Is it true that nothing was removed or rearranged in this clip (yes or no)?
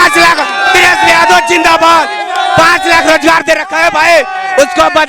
yes